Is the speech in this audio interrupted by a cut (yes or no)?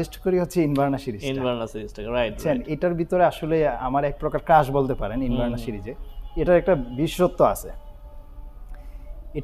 no